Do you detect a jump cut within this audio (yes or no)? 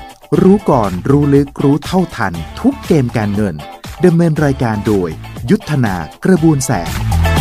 no